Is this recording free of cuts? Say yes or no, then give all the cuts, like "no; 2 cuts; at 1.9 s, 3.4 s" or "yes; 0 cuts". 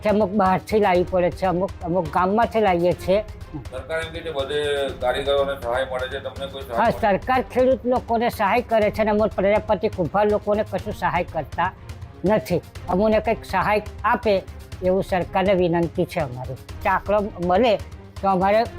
yes; 0 cuts